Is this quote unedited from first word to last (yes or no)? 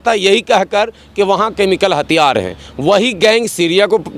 yes